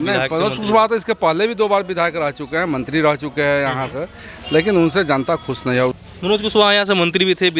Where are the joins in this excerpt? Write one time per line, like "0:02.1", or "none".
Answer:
0:05.9